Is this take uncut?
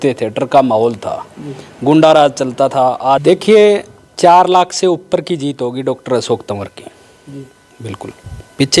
no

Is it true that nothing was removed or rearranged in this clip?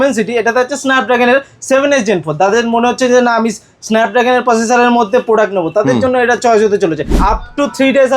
no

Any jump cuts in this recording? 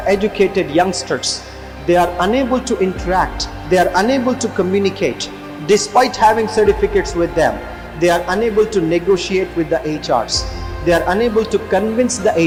no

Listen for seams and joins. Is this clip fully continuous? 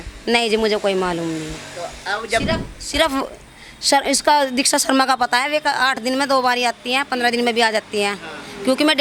yes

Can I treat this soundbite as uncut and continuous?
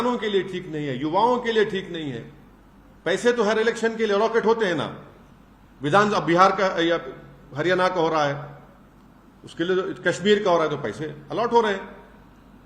yes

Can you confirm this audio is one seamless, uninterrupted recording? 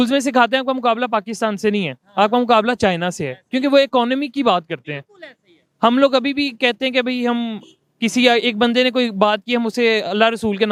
yes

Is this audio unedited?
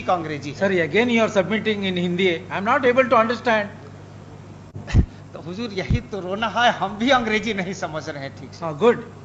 yes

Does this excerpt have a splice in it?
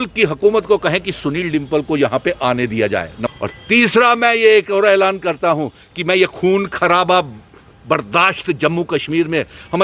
yes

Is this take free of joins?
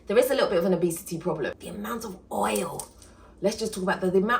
no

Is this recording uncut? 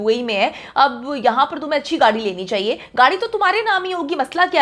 yes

